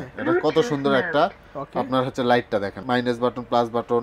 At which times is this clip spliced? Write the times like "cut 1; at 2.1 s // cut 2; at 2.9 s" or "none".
cut 1; at 2.7 s